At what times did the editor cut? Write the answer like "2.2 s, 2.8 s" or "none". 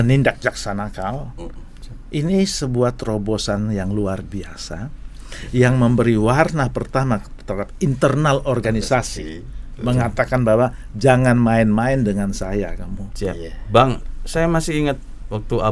none